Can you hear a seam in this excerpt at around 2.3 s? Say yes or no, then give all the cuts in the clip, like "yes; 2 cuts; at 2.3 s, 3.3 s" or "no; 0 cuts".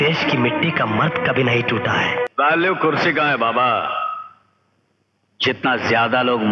yes; 1 cut; at 2.3 s